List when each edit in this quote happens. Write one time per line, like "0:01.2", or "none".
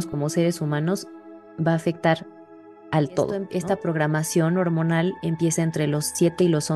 0:03.5